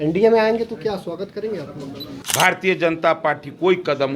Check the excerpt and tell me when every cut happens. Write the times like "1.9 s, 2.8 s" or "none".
2.2 s